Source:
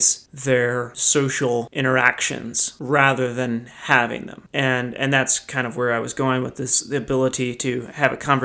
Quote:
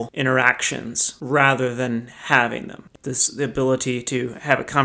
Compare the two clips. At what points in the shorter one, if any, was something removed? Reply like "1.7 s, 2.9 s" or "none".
2.9 s